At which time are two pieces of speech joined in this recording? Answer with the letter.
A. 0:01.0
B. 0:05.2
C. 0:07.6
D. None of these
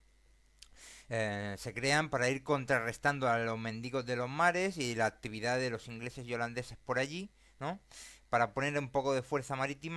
C